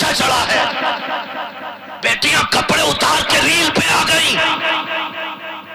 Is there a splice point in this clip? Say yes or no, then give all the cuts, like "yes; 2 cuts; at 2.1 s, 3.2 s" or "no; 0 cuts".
no; 0 cuts